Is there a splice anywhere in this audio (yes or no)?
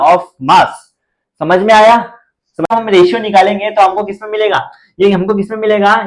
yes